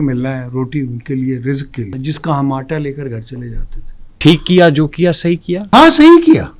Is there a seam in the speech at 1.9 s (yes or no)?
yes